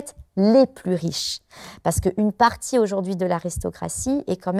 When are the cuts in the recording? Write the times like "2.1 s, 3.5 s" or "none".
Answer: none